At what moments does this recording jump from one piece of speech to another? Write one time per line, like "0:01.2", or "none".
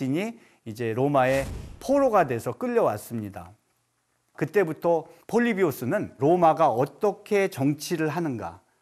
none